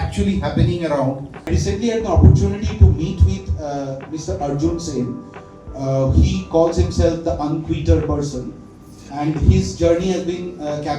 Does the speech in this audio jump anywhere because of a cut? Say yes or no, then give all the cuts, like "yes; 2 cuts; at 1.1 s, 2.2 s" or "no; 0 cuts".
yes; 1 cut; at 1.5 s